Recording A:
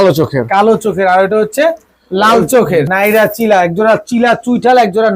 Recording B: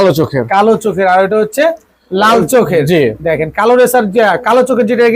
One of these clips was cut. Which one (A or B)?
A